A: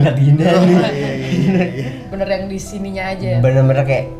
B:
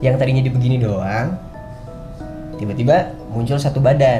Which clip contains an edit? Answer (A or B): A